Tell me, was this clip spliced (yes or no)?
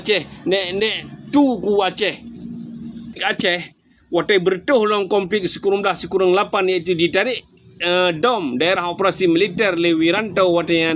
yes